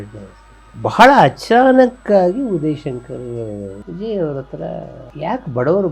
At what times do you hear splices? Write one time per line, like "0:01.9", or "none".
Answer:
0:03.8